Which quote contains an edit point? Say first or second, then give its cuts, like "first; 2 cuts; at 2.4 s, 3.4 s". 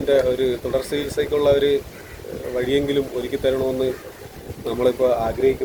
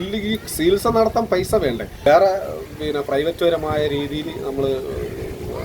second; 1 cut; at 2.0 s